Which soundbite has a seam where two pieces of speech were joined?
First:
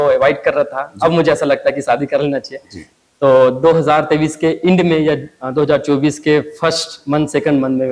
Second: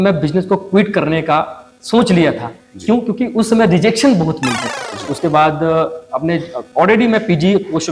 second; 1 cut; at 5.1 s

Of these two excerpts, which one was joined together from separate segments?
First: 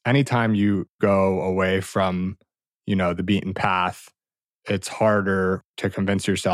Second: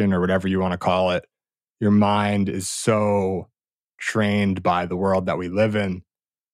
first; 2 cuts; at 1.0 s, 5.7 s

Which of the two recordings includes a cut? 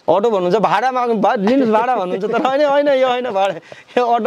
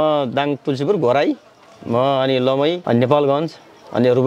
second; 1 cut; at 2.8 s

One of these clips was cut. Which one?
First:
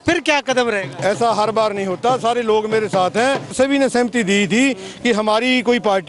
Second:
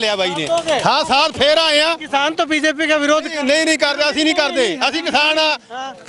first; 1 cut; at 3.5 s

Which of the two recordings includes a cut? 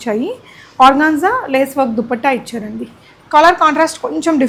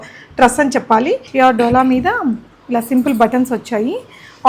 second; 1 cut; at 1.3 s

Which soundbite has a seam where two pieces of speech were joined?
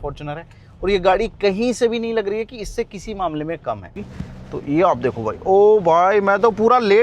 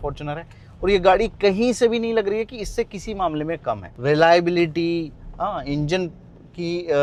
first; 1 cut; at 3.9 s

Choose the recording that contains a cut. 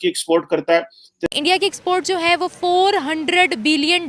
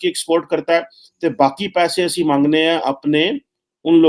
first; 1 cut; at 1.3 s

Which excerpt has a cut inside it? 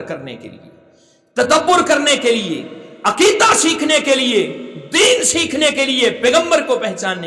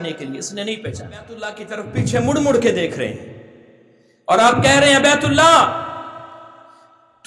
second; 1 cut; at 1.6 s

